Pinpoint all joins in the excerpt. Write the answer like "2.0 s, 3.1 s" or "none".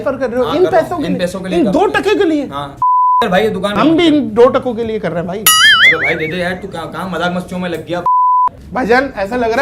8.6 s